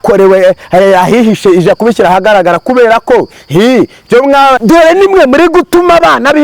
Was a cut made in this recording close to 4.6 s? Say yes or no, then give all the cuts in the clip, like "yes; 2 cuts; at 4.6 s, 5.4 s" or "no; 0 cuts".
yes; 1 cut; at 4.6 s